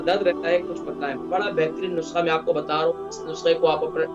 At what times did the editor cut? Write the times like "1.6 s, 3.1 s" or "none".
1.2 s